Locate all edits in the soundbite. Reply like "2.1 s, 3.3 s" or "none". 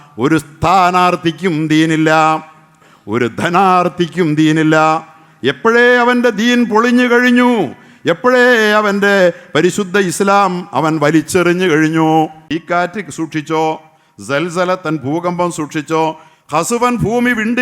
12.5 s